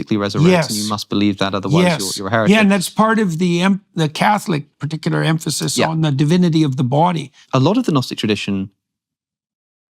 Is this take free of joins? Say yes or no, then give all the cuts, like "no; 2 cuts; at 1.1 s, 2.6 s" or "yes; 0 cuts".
no; 1 cut; at 7.4 s